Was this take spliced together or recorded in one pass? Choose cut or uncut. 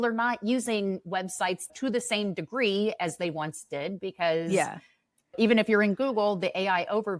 cut